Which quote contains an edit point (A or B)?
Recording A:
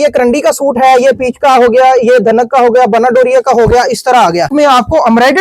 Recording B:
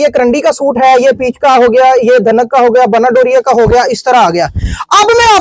A